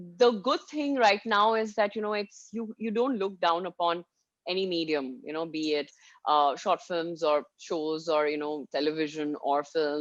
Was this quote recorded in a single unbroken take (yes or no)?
yes